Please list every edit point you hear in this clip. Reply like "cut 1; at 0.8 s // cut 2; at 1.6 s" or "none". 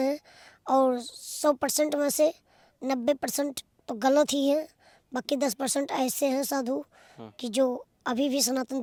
none